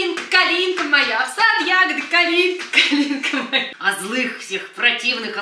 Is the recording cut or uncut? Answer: cut